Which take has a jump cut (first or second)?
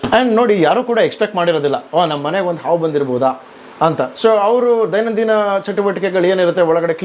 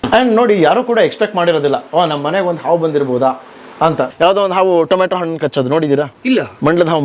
second